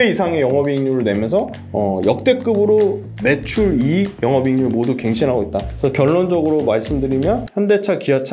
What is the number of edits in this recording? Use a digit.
5